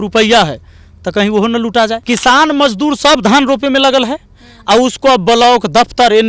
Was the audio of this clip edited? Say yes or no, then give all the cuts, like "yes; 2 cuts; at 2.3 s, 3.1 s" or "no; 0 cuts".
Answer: yes; 1 cut; at 2.0 s